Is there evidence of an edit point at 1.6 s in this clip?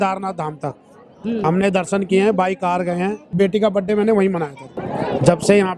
no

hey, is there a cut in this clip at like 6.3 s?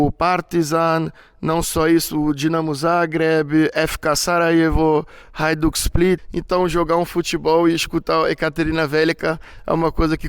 yes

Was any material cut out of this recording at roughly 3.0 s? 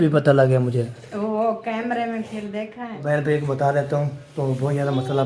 yes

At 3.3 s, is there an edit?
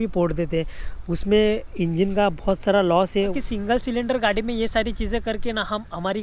yes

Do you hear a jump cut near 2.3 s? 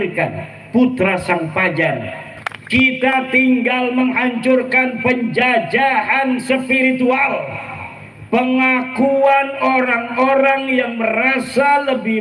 yes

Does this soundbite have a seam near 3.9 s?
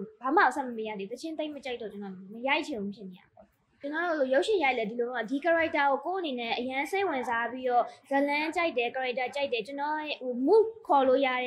yes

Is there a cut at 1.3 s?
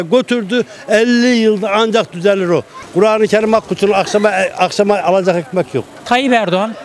no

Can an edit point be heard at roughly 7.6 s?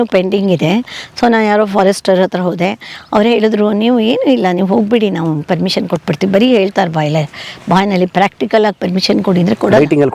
no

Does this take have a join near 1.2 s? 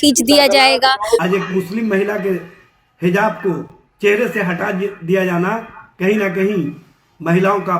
yes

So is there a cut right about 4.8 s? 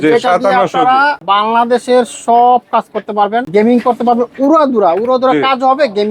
no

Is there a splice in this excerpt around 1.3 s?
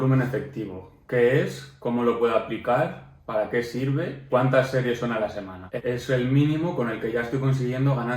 no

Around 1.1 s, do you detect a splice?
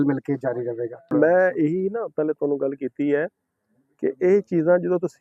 yes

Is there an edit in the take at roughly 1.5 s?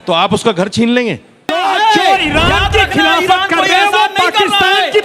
yes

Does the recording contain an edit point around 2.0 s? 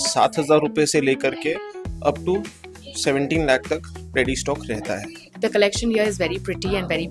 no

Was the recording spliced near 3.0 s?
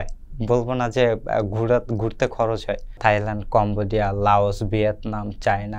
yes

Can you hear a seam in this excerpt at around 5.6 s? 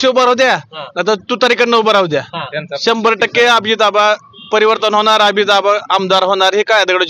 no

